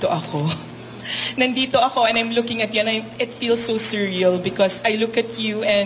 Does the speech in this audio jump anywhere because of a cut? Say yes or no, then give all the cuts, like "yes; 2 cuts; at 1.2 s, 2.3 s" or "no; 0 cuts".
no; 0 cuts